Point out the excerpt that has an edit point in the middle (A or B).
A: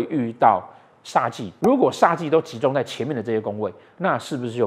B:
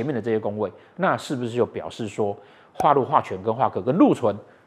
A